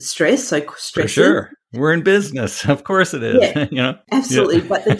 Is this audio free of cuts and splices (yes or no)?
yes